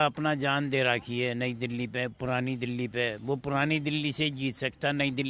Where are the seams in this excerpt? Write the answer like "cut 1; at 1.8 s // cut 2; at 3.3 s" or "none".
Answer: none